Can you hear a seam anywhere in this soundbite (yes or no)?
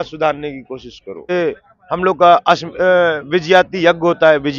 yes